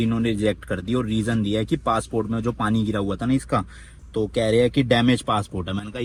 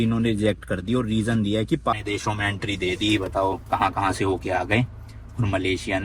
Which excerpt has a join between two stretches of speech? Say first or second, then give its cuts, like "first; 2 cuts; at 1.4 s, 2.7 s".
second; 1 cut; at 1.9 s